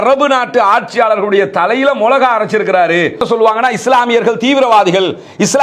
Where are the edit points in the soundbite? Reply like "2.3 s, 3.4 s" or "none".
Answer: 3.2 s